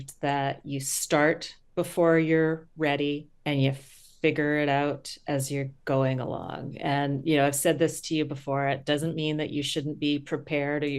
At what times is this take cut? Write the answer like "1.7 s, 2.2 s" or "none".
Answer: 1.6 s, 3.3 s